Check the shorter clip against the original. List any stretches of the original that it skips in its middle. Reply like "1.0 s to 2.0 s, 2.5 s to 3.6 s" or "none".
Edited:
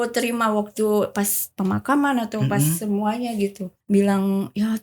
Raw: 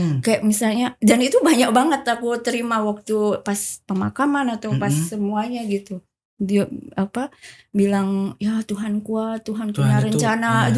6.0 s to 7.5 s